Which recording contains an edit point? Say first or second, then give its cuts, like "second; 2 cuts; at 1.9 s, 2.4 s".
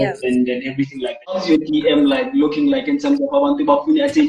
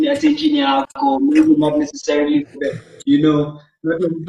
first; 1 cut; at 1.4 s